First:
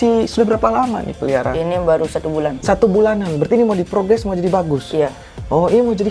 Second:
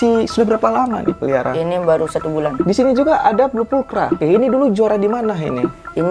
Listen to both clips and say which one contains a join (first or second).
second